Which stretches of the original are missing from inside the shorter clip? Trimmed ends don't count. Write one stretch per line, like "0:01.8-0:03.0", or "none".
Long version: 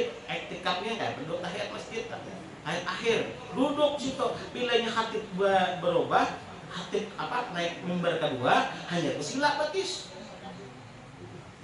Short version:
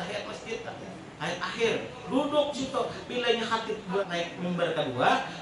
0:05.5-0:07.5

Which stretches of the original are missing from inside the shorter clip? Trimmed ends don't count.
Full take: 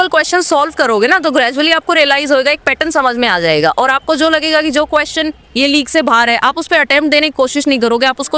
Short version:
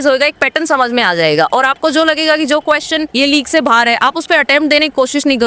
0:05.3-0:05.5

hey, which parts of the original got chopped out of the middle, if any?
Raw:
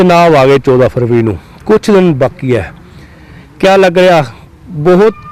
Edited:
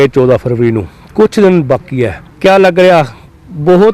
0:02.7-0:03.4

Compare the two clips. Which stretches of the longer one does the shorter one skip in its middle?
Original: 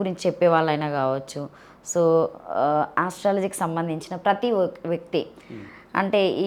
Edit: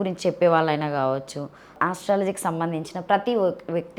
0:01.8-0:02.9

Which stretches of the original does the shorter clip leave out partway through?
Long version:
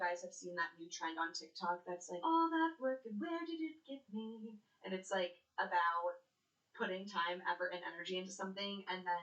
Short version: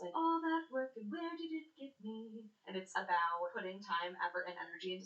0:04.8-0:05.4
0:06.2-0:06.8

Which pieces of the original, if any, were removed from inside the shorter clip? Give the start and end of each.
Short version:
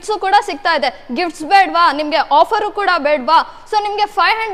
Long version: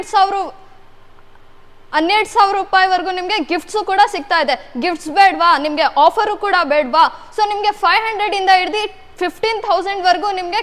none

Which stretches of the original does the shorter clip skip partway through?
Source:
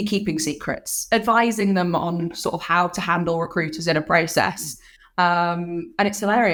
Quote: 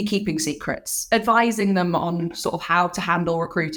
none

